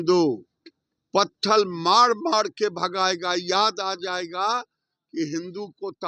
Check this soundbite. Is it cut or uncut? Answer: uncut